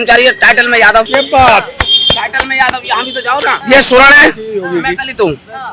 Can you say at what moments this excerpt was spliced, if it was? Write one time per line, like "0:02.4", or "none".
0:01.1
0:03.5

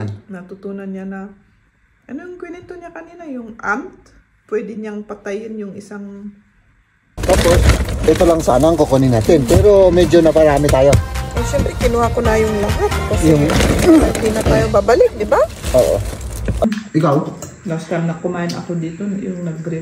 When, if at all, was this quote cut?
0:07.0
0:16.6

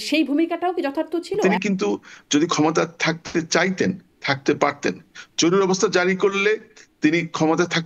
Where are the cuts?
0:01.4

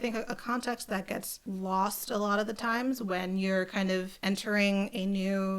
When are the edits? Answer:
0:01.3
0:04.1

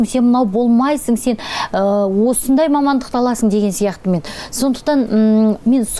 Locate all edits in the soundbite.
none

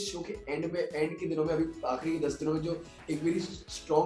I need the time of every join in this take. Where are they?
none

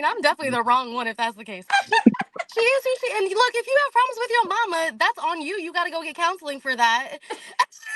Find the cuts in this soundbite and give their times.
0:01.6

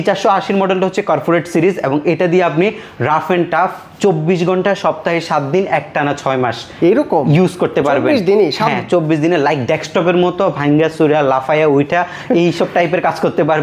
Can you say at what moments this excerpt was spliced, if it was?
none

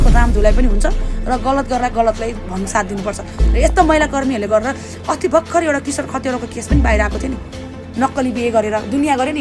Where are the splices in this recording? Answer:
none

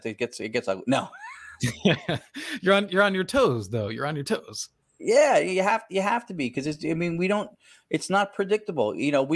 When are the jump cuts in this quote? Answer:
none

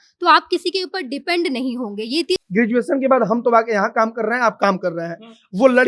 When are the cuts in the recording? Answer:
0:02.4

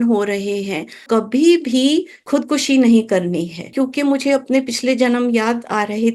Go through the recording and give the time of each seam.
0:01.0
0:02.2
0:03.7

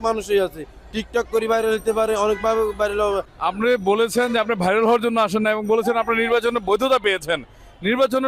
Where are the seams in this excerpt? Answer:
0:03.3

